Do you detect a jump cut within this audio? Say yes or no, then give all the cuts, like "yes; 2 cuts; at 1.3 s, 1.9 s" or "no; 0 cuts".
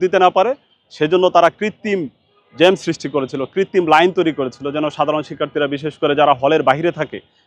no; 0 cuts